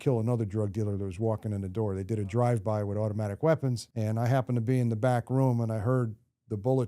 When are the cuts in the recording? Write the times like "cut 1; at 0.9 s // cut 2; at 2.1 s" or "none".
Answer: cut 1; at 3.9 s